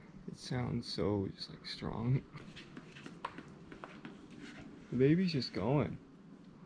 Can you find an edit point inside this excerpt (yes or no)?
yes